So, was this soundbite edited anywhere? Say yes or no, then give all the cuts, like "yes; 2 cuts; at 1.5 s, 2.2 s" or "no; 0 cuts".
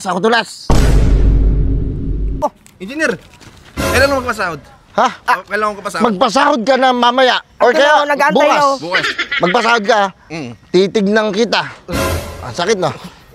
yes; 1 cut; at 2.4 s